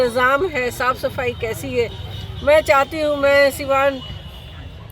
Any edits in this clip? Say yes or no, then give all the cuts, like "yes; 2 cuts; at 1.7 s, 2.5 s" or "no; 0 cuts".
no; 0 cuts